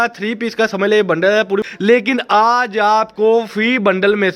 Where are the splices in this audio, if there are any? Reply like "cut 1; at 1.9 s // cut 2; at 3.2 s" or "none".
cut 1; at 1.6 s

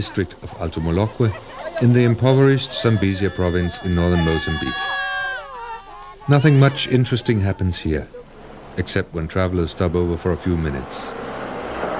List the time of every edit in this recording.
cut 1; at 9.2 s

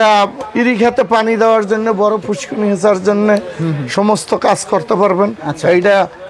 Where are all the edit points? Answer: none

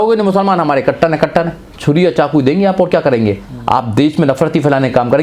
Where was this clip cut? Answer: cut 1; at 1.7 s

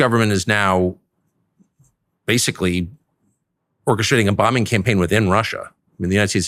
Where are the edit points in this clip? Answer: none

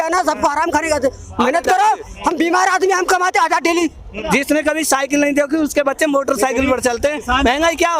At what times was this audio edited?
cut 1; at 4.2 s

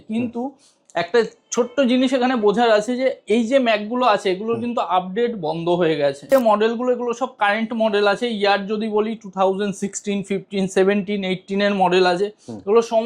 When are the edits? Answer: cut 1; at 6.3 s

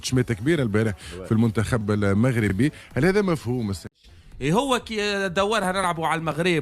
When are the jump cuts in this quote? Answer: cut 1; at 4.0 s

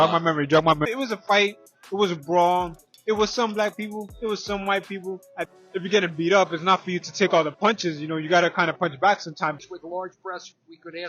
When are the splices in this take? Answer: cut 1; at 0.9 s // cut 2; at 5.5 s // cut 3; at 9.6 s

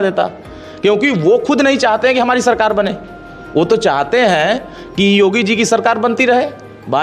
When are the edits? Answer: none

